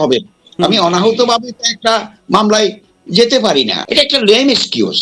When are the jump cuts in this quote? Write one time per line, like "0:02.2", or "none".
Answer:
0:03.8